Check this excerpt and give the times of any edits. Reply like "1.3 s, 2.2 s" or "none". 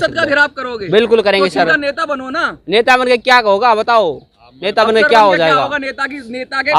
none